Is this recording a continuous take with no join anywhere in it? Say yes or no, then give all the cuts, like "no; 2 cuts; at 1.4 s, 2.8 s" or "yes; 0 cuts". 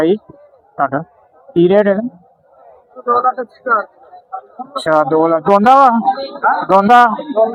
yes; 0 cuts